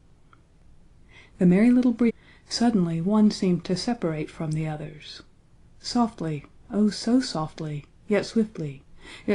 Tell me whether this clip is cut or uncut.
uncut